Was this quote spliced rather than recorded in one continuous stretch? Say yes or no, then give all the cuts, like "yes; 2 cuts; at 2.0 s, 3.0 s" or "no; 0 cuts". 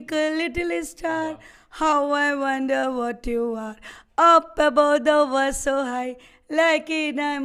no; 0 cuts